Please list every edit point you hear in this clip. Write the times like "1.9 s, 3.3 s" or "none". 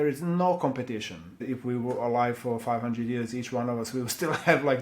1.4 s

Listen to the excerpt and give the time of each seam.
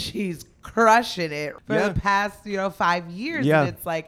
1.5 s

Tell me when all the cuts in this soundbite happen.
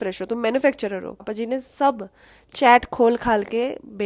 1.3 s

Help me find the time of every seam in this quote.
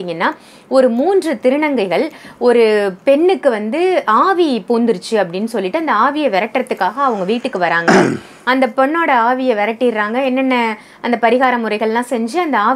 none

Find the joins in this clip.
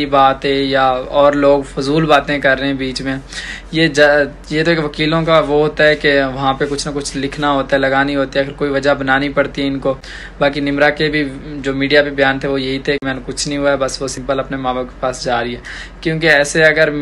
none

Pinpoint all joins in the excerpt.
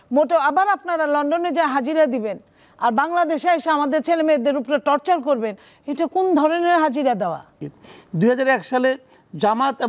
7.5 s

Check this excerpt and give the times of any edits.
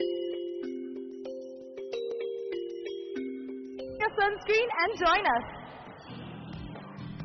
none

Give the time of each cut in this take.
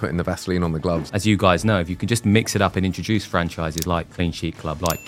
1.0 s, 4.1 s

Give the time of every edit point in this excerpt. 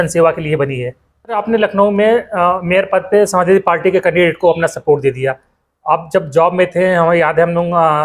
1.4 s

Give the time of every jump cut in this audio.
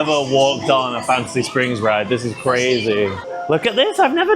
3.3 s

